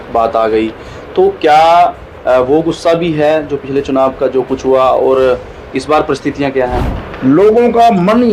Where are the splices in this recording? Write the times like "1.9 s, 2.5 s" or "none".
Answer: 7.0 s